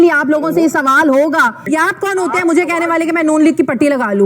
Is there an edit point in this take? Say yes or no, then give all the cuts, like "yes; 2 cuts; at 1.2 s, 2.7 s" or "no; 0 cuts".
yes; 1 cut; at 1.7 s